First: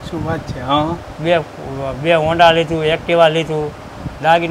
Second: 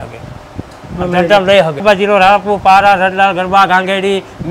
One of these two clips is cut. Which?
second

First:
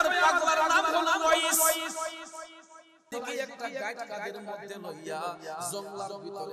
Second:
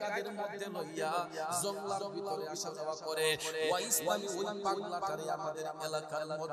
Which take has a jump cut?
first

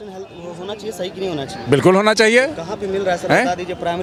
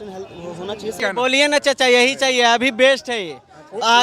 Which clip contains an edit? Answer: second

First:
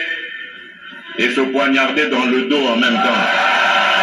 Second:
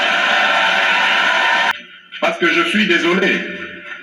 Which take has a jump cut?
second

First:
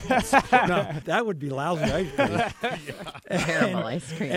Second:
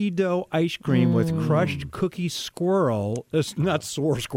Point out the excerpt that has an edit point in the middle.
first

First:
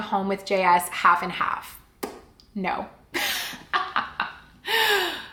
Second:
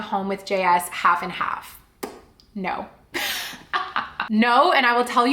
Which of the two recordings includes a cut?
second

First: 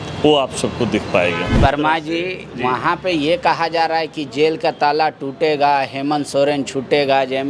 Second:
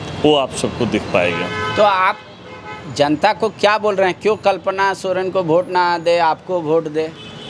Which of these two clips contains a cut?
first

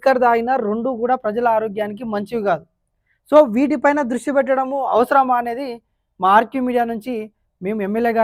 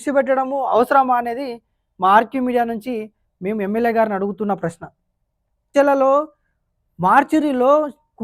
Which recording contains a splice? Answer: second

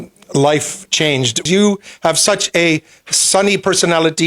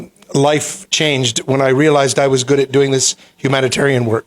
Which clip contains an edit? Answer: first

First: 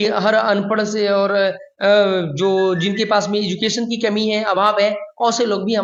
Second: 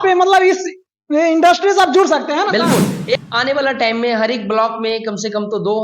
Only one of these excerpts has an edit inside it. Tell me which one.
second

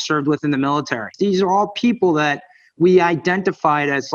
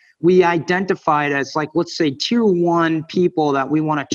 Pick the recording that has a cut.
first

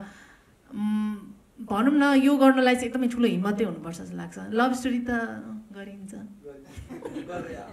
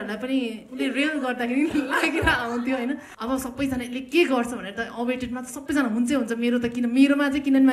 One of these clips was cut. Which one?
second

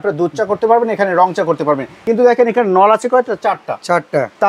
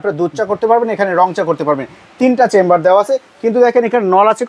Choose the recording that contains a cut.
first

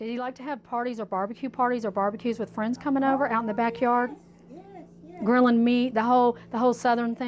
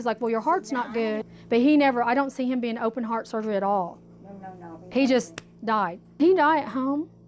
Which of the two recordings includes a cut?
second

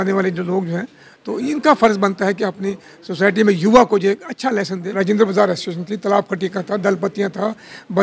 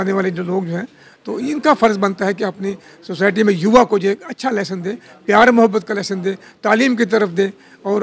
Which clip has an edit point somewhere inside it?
first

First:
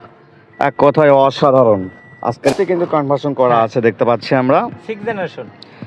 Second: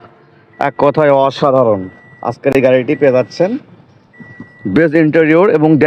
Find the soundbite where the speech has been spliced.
first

